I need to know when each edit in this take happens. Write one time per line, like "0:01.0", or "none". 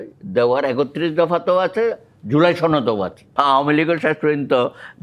0:03.3